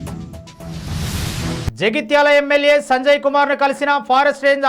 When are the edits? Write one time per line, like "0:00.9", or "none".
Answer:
0:01.7